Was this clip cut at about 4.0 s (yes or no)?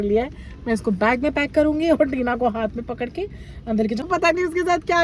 yes